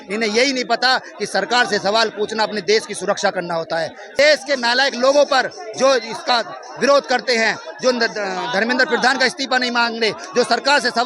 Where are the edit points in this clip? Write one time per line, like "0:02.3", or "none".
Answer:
0:04.1